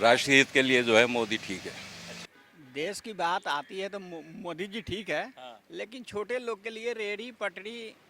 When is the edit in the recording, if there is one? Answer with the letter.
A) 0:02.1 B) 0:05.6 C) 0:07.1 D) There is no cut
A